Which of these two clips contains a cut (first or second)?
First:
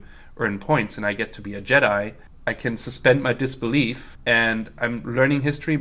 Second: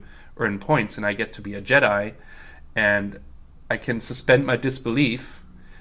first